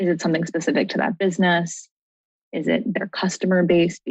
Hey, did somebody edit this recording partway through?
no; 0 cuts

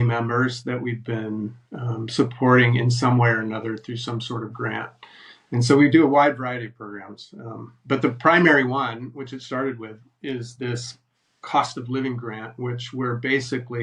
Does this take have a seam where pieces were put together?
no; 0 cuts

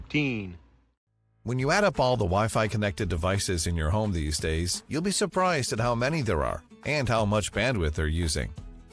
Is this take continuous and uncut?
no; 1 cut; at 1.1 s

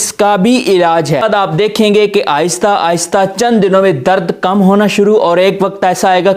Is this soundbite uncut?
no; 1 cut; at 1.2 s

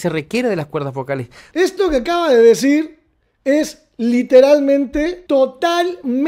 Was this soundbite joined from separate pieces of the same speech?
yes; 2 cuts; at 1.4 s, 5.2 s

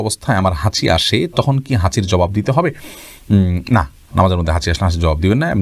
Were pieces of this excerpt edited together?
no; 0 cuts

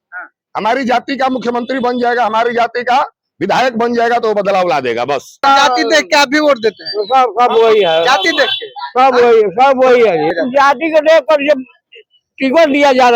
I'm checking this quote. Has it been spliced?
yes; 2 cuts; at 5.4 s, 10.4 s

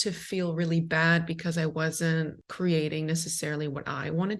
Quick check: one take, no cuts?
no; 1 cut; at 2.4 s

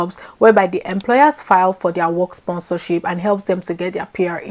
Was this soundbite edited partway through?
no; 0 cuts

